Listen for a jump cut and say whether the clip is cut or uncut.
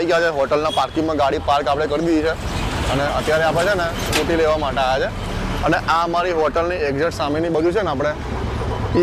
uncut